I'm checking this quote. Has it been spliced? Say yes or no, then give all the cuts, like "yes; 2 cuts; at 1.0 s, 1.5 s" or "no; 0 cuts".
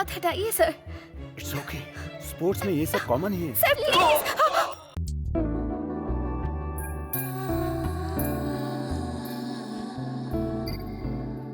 yes; 1 cut; at 4.9 s